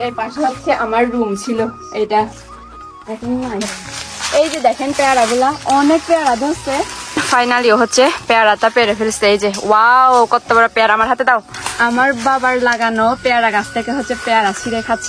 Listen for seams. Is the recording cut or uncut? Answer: cut